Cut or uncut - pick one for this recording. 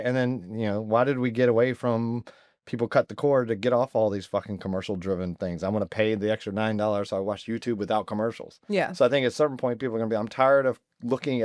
uncut